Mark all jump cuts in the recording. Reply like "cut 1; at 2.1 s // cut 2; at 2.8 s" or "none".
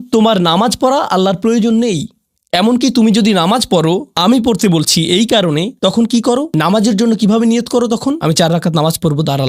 none